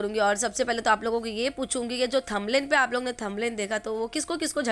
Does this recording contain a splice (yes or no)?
no